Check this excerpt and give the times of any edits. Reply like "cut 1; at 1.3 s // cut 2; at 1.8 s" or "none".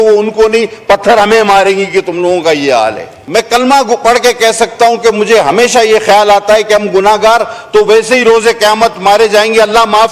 cut 1; at 3.1 s